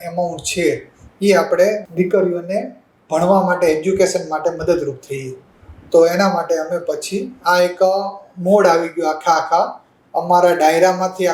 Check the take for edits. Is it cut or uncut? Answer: cut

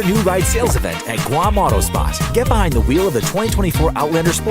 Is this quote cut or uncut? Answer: cut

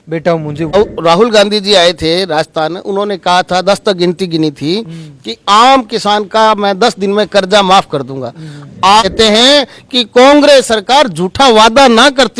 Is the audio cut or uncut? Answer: cut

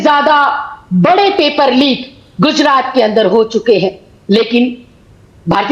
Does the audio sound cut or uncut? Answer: uncut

